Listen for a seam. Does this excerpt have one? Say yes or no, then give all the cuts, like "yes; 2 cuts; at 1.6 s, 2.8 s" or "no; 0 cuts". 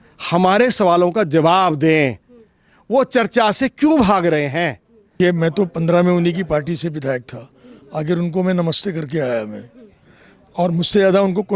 yes; 1 cut; at 5.1 s